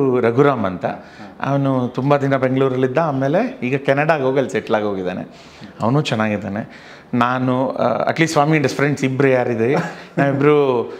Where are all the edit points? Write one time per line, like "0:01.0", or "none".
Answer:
none